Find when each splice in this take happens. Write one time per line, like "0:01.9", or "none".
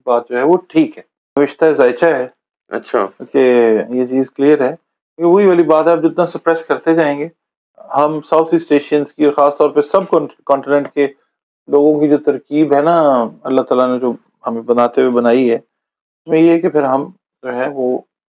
0:01.4

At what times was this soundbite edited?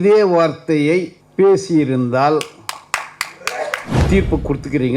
0:01.2
0:03.9

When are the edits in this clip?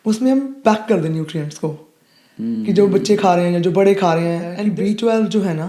0:04.5

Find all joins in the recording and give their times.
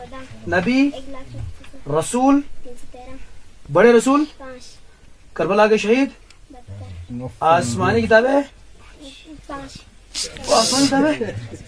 none

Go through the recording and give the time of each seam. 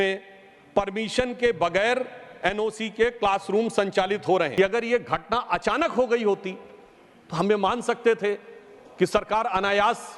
0:04.5

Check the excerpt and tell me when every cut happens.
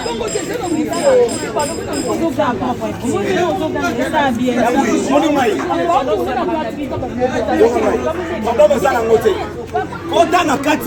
none

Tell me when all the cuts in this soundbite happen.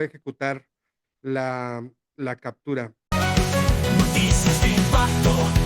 0:03.1

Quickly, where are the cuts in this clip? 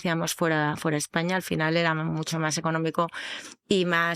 none

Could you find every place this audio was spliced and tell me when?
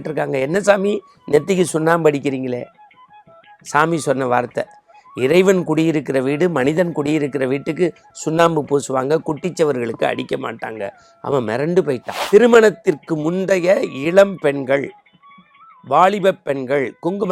0:12.1

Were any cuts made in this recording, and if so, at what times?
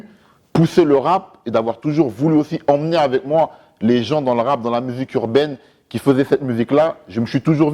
none

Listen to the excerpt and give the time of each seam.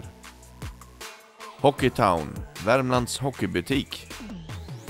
0:03.9

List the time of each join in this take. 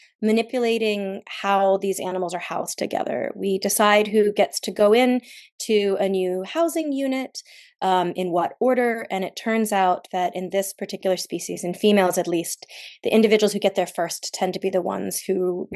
none

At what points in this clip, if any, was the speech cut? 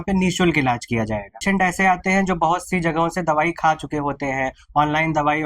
0:01.4

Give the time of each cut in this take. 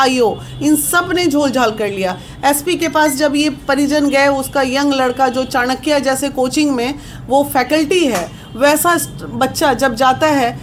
none

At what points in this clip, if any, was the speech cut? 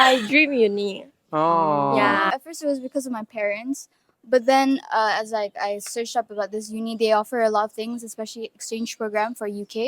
0:02.3

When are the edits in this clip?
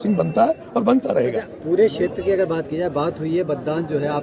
none

